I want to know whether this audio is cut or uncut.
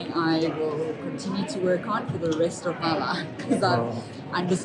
uncut